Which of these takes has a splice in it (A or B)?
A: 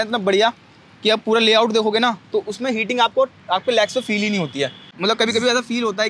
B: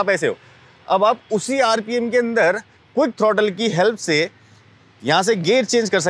A